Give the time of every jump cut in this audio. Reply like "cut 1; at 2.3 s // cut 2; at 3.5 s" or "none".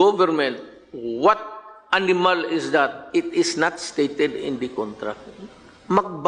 none